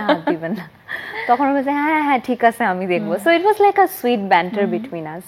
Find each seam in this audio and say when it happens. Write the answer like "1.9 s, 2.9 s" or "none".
none